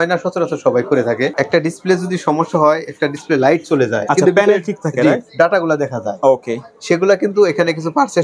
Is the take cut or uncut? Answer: cut